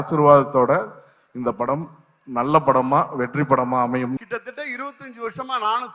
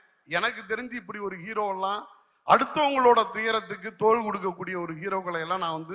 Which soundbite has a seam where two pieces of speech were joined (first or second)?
first